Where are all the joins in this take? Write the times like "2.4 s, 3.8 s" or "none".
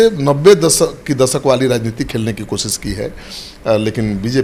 none